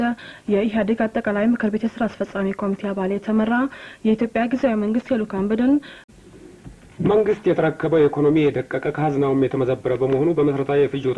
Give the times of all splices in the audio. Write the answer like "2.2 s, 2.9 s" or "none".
6.0 s